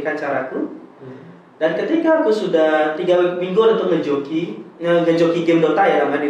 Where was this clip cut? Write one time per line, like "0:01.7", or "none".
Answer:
none